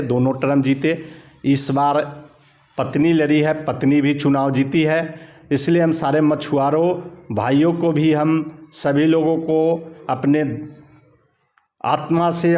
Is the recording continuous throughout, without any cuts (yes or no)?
yes